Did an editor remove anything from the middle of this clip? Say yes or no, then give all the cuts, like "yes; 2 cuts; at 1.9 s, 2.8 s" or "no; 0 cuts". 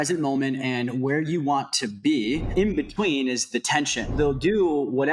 yes; 2 cuts; at 2.5 s, 4.1 s